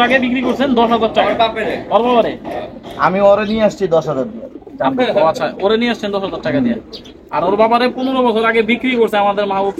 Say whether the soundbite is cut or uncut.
uncut